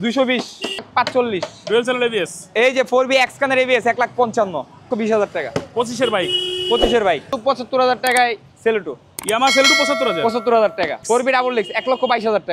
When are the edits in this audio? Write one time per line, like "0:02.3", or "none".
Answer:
0:00.9
0:02.4
0:04.9
0:07.3
0:11.0